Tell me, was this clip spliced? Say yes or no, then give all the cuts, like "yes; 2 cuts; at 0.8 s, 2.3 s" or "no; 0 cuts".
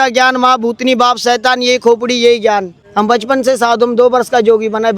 yes; 1 cut; at 2.8 s